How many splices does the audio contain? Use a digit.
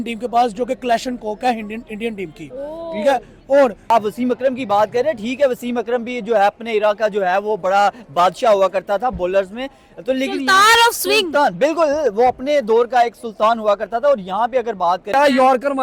2